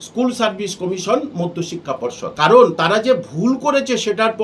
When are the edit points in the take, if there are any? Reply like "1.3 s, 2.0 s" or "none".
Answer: 2.3 s